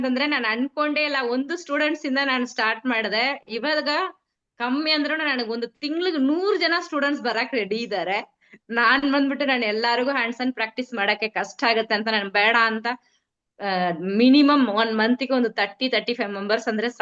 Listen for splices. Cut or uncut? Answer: uncut